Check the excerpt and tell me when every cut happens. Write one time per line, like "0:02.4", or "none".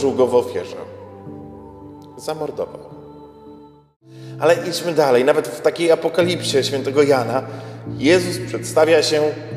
0:04.1

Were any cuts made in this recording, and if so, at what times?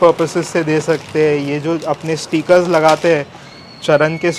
none

